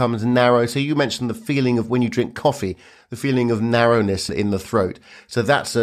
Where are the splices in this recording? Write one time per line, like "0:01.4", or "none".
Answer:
0:04.3